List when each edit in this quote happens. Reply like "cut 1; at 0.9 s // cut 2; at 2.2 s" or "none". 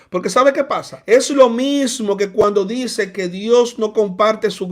cut 1; at 0.9 s

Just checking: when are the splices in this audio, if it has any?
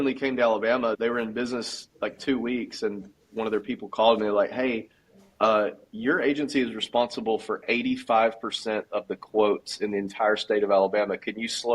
cut 1; at 1.0 s

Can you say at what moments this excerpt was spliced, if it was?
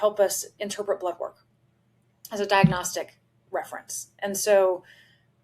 none

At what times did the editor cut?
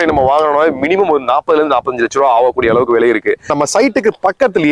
cut 1; at 3.5 s

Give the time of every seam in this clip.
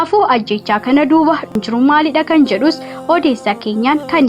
cut 1; at 1.5 s

